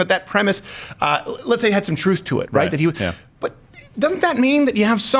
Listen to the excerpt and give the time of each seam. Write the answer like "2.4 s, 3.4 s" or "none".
none